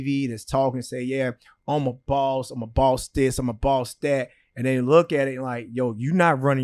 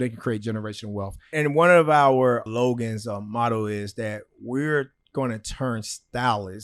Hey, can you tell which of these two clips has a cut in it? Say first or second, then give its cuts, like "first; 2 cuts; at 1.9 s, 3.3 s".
second; 2 cuts; at 1.3 s, 2.5 s